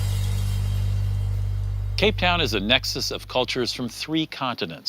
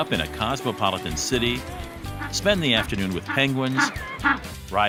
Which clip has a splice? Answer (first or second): first